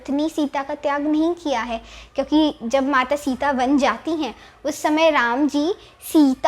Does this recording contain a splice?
no; 0 cuts

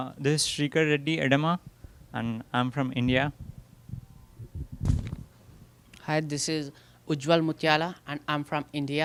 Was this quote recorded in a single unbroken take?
yes; 0 cuts

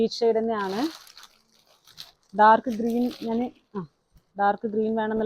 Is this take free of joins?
yes; 0 cuts

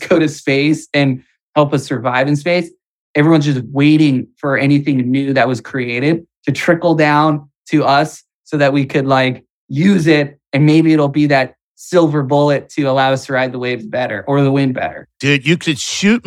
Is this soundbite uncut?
no; 1 cut; at 15.0 s

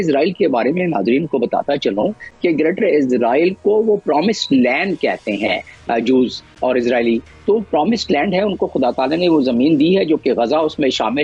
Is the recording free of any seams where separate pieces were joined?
yes; 0 cuts

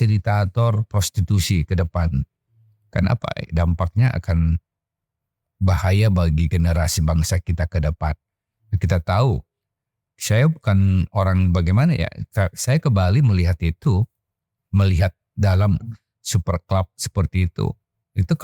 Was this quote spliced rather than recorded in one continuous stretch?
no; 0 cuts

